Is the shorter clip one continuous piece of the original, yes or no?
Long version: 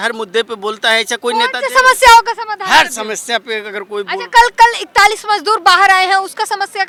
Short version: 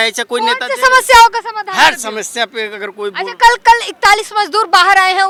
yes